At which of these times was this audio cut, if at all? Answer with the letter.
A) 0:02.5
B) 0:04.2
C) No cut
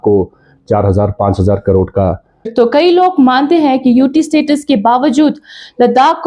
A